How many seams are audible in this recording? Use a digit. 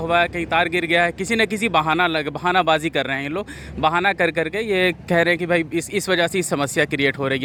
0